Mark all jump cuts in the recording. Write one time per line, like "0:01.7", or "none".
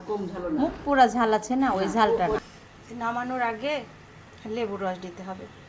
0:02.4